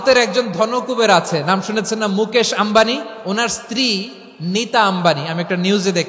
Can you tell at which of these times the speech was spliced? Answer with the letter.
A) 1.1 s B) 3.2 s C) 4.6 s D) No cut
B